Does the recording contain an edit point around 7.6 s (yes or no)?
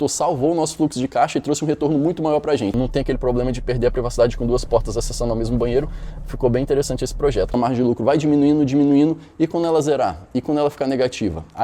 yes